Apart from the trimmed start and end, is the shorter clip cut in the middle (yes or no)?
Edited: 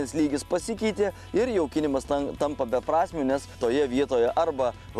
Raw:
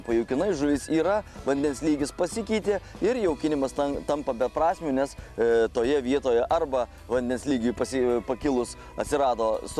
yes